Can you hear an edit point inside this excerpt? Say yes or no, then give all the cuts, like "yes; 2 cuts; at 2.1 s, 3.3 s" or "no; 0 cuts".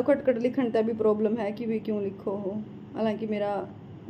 no; 0 cuts